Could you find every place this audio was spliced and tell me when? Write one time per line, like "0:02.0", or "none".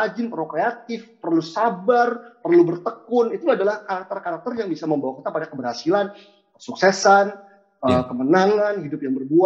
none